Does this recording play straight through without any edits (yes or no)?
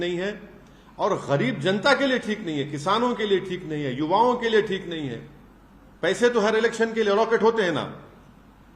yes